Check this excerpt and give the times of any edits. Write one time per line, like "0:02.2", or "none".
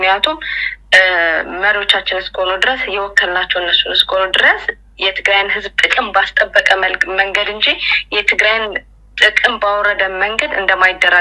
none